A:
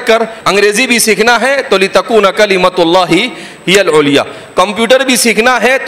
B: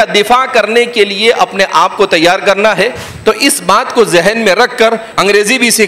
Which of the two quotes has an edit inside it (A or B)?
B